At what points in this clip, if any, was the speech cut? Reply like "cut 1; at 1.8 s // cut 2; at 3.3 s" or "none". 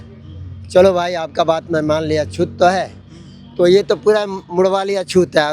none